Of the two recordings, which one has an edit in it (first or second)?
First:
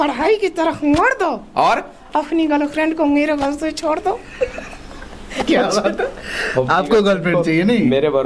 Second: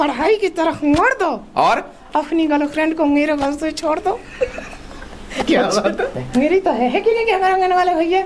second